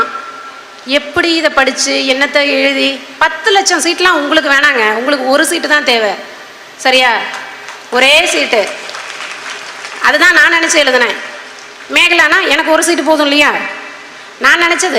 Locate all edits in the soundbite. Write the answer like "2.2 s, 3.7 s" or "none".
none